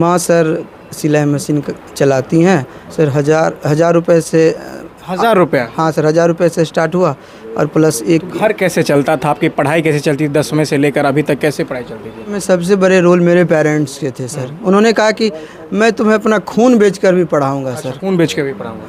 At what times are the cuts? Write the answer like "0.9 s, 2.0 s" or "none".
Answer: 2.8 s, 12.4 s